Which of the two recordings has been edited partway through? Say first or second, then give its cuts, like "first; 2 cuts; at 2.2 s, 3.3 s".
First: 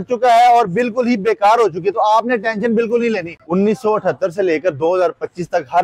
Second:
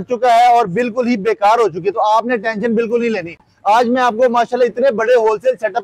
first; 1 cut; at 3.4 s